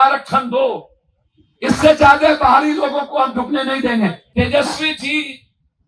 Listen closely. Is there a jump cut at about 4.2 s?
yes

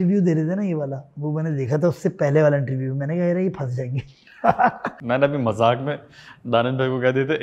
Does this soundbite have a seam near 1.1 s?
no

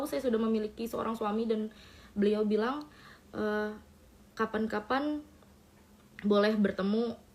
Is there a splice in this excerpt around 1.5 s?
no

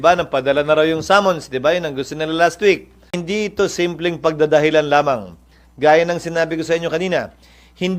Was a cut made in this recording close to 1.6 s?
no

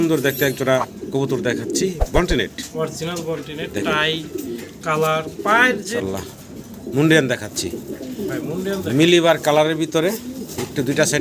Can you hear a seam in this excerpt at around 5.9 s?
yes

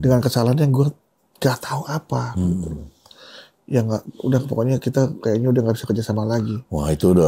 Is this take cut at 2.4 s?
no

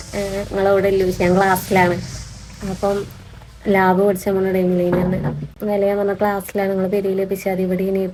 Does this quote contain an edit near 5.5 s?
no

